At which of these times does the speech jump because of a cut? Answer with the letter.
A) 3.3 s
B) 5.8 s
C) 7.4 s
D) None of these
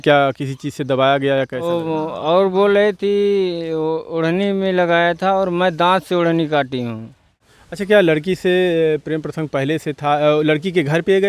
C